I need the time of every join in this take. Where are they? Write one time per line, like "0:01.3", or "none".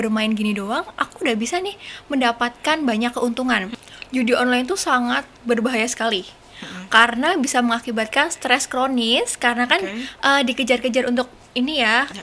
0:03.7